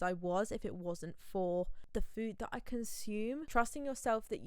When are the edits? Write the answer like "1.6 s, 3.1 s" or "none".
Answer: 1.8 s, 3.5 s